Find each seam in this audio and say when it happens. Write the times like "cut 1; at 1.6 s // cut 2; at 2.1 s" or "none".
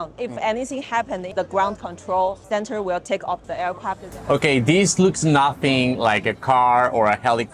cut 1; at 1.3 s // cut 2; at 2.4 s // cut 3; at 4.0 s